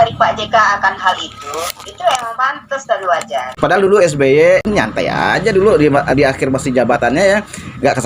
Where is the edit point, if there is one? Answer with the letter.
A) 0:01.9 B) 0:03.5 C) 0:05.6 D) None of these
B